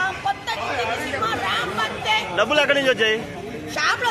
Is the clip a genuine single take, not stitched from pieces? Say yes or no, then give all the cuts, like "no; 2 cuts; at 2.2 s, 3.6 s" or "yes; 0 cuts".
yes; 0 cuts